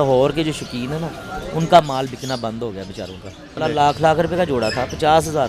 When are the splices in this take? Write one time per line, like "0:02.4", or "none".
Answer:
0:03.6